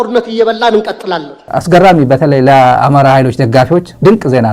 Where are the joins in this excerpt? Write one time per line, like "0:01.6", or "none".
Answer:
0:01.4